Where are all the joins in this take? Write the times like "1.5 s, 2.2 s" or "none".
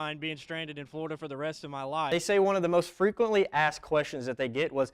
2.1 s